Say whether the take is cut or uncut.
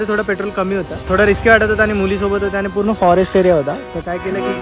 cut